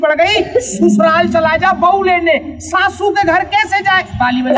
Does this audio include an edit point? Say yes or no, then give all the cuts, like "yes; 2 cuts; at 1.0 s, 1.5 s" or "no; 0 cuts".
no; 0 cuts